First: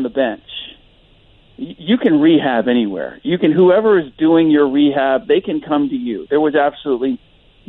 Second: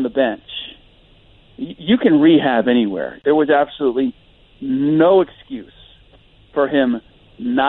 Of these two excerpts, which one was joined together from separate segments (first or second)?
second